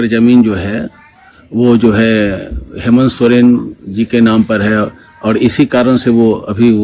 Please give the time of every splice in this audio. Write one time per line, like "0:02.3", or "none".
none